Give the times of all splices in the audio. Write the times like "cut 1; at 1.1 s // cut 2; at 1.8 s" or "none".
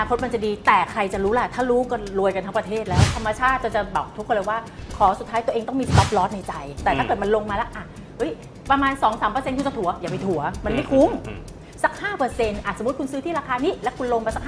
cut 1; at 3.1 s // cut 2; at 6.8 s